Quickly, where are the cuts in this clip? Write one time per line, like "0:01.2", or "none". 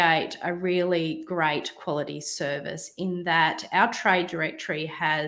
none